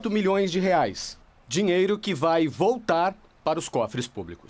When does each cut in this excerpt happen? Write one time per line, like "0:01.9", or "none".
0:01.3